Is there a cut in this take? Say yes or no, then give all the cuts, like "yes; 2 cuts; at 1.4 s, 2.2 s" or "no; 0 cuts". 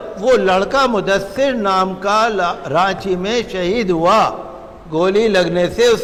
no; 0 cuts